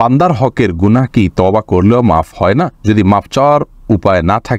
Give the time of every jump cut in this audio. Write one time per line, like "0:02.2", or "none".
none